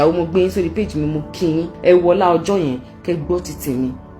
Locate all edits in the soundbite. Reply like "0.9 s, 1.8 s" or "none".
1.7 s